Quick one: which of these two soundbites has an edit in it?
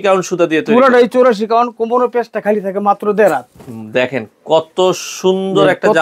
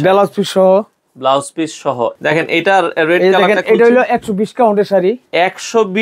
second; 1 cut; at 2.1 s

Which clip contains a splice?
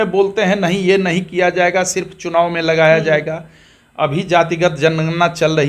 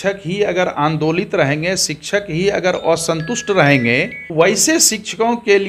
second; 1 cut; at 4.2 s

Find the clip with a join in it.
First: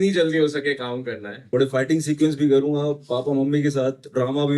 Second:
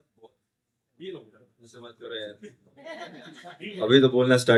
first; 1 cut; at 1.3 s

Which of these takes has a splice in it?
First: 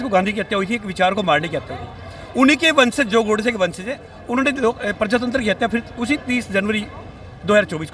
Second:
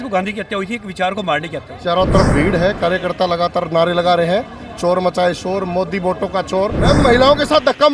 second; 2 cuts; at 1.8 s, 6.8 s

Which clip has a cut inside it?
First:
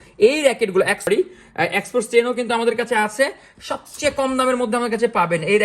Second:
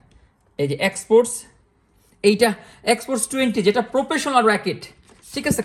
first; 1 cut; at 1.1 s

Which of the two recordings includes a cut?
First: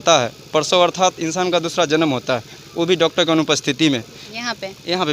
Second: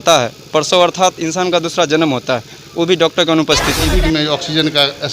second; 1 cut; at 3.9 s

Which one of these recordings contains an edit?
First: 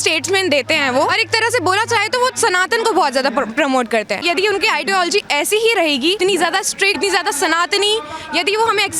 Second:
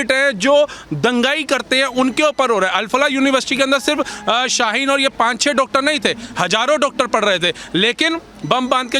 first; 4 cuts; at 1.1 s, 4.2 s, 6.2 s, 7.0 s

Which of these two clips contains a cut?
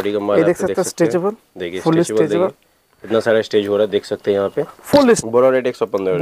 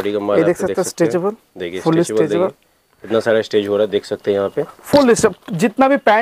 first; 1 cut; at 5.2 s

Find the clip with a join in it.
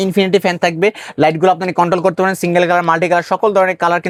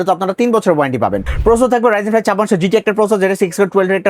second; 1 cut; at 1.3 s

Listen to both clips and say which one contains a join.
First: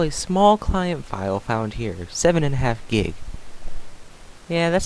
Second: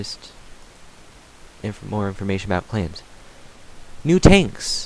first; 1 cut; at 3.1 s

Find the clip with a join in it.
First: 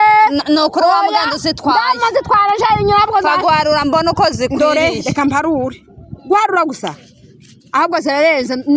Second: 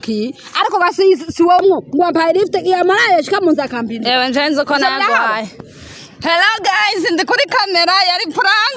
second; 1 cut; at 1.6 s

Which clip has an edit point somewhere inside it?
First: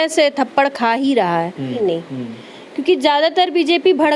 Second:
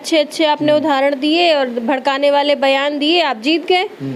first; 1 cut; at 1.8 s

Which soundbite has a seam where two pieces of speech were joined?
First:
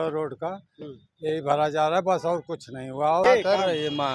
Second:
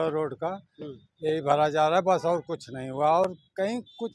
first; 1 cut; at 3.2 s

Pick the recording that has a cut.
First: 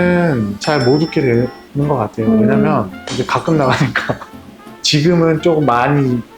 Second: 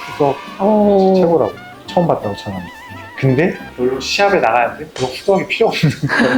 first; 1 cut; at 4.7 s

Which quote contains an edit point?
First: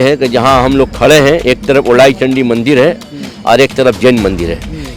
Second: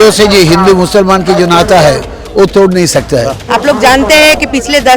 second; 1 cut; at 3.4 s

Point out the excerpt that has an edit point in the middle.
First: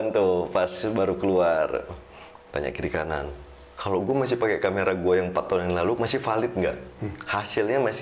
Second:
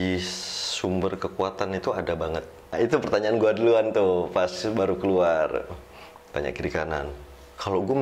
second; 1 cut; at 2.7 s

